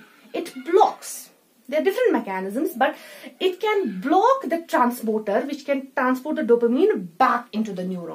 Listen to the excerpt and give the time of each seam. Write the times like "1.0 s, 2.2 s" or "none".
none